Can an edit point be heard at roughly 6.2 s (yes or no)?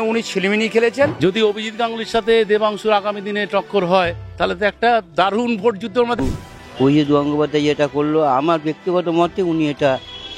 yes